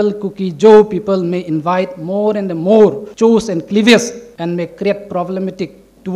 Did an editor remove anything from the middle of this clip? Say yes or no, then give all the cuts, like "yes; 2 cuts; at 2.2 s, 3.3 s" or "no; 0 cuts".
yes; 2 cuts; at 3.1 s, 4.2 s